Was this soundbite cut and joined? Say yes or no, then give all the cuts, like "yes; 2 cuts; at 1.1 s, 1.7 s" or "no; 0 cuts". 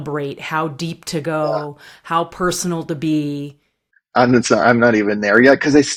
no; 0 cuts